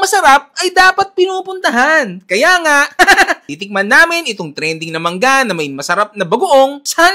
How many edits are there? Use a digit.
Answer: 0